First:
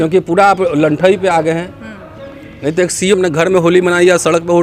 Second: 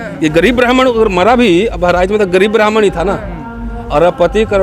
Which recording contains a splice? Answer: first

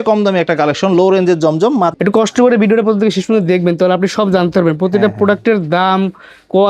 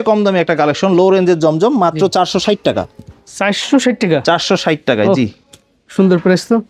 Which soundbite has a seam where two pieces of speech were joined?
first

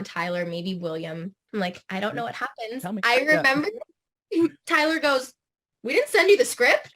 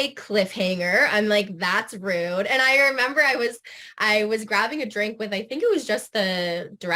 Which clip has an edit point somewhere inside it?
first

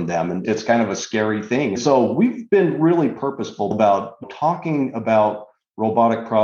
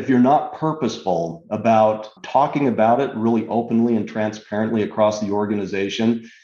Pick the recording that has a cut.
first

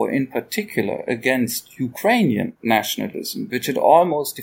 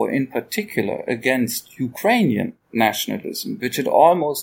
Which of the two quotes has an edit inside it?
first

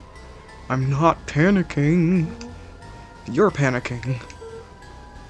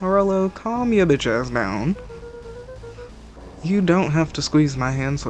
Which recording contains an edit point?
second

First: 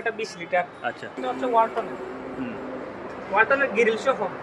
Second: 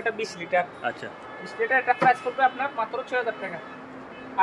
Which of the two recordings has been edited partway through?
first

